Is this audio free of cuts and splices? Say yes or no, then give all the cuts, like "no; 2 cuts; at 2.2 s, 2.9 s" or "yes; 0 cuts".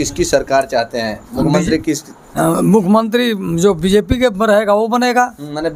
yes; 0 cuts